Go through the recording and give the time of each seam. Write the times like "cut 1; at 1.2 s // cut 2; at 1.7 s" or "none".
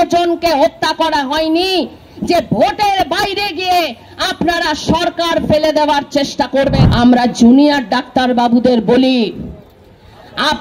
cut 1; at 6.8 s